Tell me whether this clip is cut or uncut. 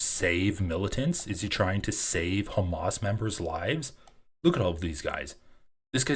uncut